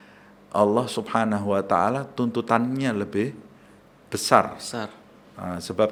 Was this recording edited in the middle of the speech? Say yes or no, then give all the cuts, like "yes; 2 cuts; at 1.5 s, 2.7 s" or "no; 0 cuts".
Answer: no; 0 cuts